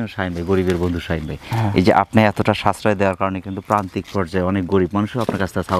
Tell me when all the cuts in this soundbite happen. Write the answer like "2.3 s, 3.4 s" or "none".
none

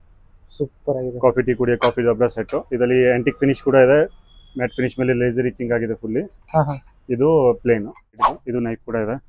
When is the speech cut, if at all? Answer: 8.1 s

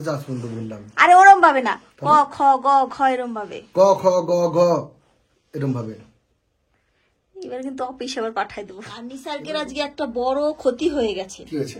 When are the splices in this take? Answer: 9.2 s

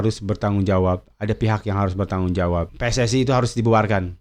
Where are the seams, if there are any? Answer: 2.7 s

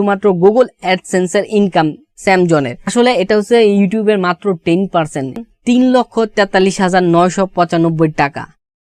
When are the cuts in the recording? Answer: 5.4 s

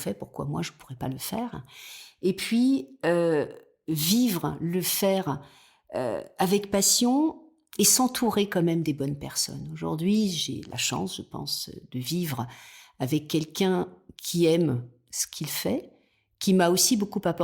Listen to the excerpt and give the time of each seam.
none

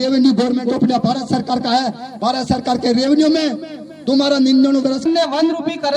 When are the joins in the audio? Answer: 5.0 s

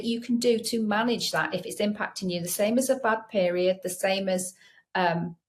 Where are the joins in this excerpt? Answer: none

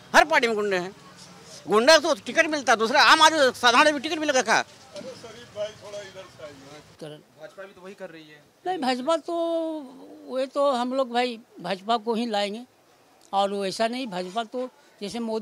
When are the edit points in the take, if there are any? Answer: 6.9 s

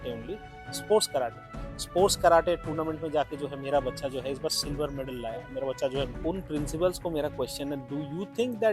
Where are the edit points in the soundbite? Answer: 6.1 s

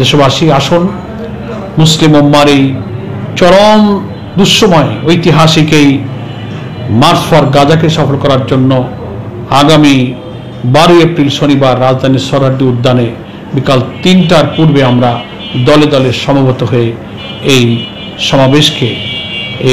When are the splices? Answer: none

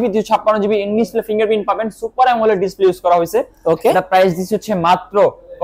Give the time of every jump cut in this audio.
none

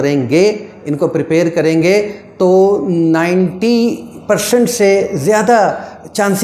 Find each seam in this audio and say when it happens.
none

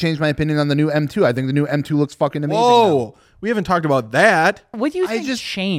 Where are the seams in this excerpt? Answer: 4.8 s

